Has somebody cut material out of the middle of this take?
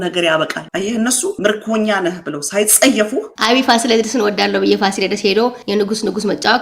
yes; 2 cuts; at 1.3 s, 3.3 s

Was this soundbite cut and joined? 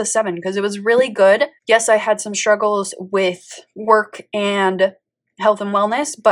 yes; 1 cut; at 1.6 s

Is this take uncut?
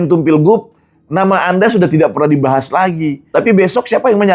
no; 1 cut; at 3.2 s

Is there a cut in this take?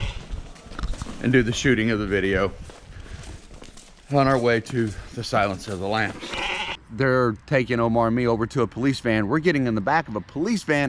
yes; 1 cut; at 6.8 s

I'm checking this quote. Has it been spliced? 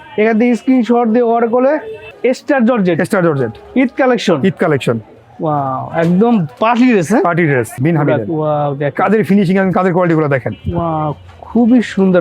yes; 2 cuts; at 2.1 s, 7.8 s

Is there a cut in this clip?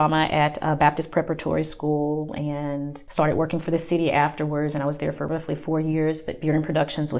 yes; 2 cuts; at 3.0 s, 5.2 s

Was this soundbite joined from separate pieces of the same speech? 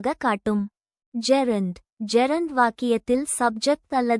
yes; 1 cut; at 1.0 s

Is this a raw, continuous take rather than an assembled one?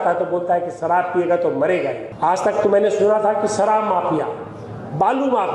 no; 1 cut; at 2.1 s

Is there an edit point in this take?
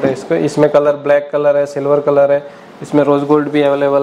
no; 0 cuts

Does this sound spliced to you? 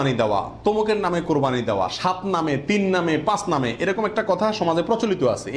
no; 0 cuts

